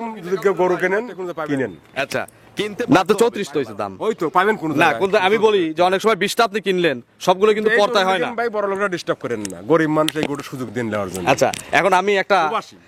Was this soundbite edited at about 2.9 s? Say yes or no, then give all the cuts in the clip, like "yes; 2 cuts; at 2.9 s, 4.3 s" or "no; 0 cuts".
yes; 1 cut; at 2.9 s